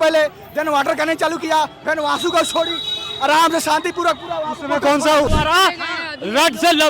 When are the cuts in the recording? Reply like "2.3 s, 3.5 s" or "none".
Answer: 5.3 s